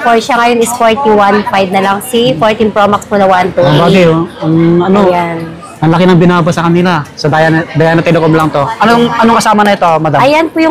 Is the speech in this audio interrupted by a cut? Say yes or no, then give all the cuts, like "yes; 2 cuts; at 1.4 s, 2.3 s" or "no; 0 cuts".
no; 0 cuts